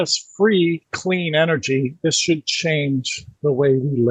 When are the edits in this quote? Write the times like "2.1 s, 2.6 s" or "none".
none